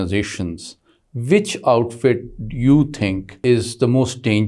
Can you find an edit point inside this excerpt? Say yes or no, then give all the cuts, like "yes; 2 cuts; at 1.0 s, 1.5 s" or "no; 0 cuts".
yes; 1 cut; at 3.3 s